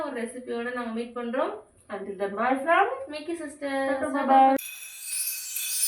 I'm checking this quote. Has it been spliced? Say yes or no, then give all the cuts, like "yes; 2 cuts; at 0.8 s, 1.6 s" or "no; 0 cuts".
yes; 1 cut; at 4.6 s